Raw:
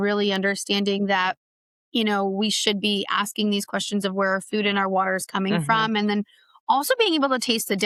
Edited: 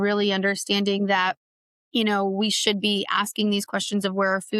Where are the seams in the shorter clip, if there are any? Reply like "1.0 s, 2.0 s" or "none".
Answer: none

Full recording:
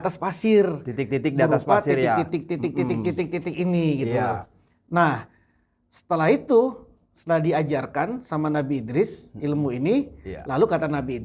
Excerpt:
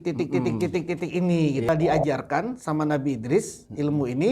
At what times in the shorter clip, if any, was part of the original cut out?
1.7 s

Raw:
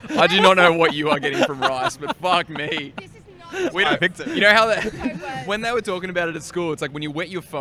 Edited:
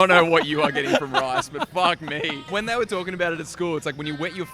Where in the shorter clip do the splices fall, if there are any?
2.4 s

